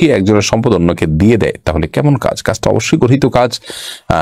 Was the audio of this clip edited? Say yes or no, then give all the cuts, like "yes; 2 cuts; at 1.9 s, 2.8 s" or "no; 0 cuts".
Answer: no; 0 cuts